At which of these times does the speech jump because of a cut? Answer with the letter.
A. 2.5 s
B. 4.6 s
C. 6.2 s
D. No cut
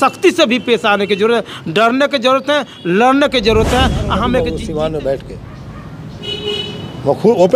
B